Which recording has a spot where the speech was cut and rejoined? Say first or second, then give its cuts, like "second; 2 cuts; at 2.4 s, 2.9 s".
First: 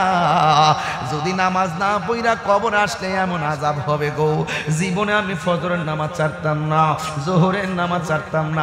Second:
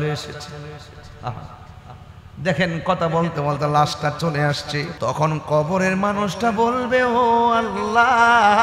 second; 1 cut; at 4.9 s